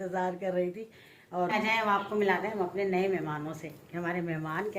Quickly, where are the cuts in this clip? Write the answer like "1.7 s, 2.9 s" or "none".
1.5 s